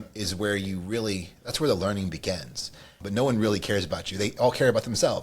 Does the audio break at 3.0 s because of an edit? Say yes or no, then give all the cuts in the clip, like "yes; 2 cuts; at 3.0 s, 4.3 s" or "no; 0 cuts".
yes; 1 cut; at 3.0 s